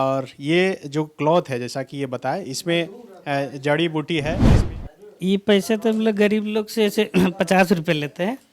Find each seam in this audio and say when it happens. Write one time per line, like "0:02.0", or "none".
0:04.5